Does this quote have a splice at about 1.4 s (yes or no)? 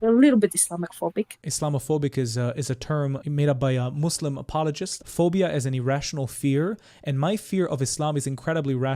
yes